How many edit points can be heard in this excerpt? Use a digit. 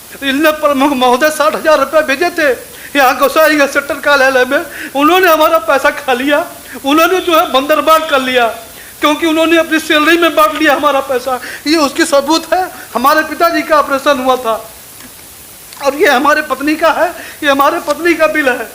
0